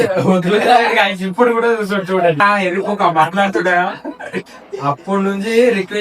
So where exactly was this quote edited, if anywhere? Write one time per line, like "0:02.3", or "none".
0:02.4